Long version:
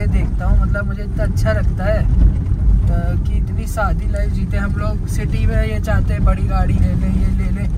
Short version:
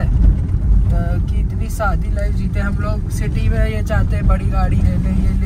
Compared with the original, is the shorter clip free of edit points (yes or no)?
yes